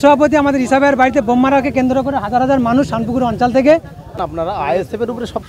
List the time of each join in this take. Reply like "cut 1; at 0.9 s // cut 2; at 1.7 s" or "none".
cut 1; at 4.1 s